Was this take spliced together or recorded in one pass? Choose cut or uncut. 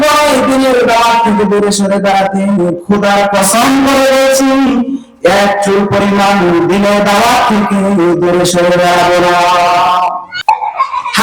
cut